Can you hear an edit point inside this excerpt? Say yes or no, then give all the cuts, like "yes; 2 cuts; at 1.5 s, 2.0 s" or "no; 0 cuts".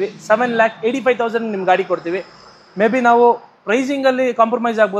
no; 0 cuts